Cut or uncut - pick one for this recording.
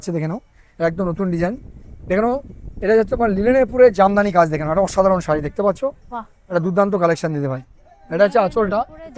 uncut